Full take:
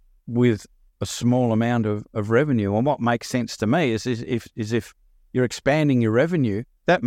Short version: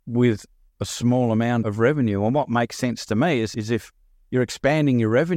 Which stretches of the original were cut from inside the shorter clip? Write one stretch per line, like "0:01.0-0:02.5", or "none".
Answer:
0:01.8-0:02.2
0:04.0-0:04.5